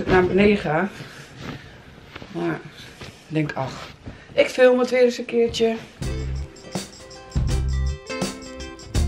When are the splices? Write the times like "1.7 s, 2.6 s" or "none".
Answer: none